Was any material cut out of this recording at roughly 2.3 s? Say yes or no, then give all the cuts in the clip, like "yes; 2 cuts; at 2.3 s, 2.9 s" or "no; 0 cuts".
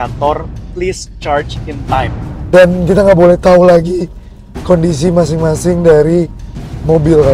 yes; 1 cut; at 2.3 s